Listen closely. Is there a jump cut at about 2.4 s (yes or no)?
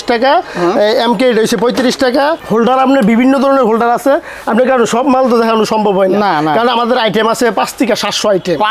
yes